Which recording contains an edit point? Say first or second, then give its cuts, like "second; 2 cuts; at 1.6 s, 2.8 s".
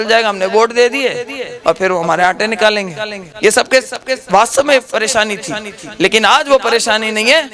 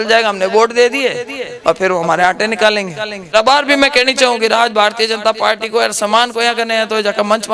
second; 1 cut; at 3.3 s